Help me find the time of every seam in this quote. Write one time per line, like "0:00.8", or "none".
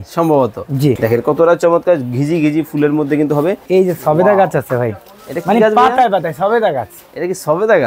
0:01.0
0:03.6